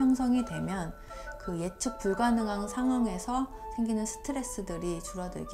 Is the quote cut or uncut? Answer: cut